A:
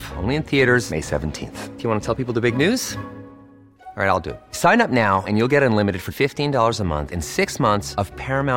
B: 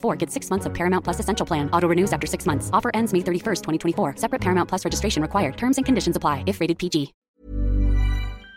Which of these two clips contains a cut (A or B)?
B